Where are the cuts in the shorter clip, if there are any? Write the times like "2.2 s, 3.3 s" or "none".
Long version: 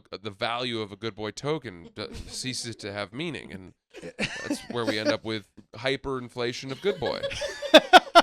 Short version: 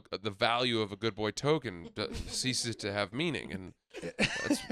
none